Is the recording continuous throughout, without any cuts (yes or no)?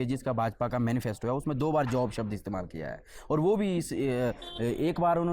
yes